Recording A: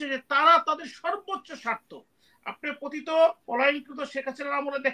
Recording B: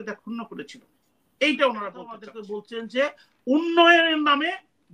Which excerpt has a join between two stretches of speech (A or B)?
B